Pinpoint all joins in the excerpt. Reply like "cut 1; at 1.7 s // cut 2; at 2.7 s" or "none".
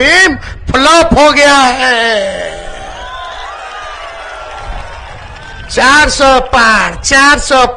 none